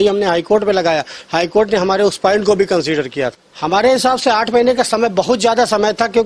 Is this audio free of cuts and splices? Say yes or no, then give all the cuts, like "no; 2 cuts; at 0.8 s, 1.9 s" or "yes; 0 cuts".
no; 1 cut; at 3.5 s